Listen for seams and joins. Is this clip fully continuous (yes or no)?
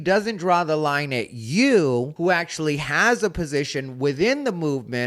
no